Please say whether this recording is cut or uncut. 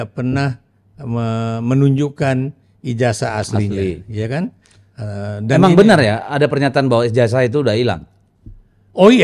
uncut